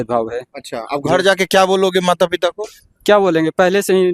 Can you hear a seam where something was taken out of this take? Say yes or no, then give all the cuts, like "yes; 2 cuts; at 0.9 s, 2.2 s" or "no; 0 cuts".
no; 0 cuts